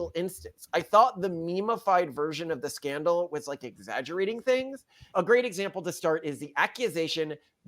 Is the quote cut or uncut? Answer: cut